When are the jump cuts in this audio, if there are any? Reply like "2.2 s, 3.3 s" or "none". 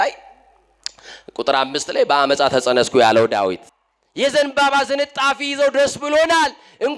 3.7 s